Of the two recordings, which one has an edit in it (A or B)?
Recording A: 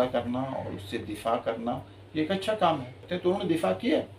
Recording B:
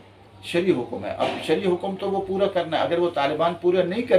A